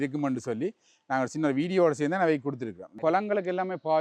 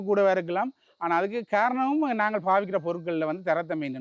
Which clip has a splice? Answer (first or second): first